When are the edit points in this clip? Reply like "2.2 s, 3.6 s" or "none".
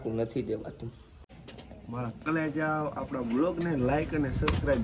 1.4 s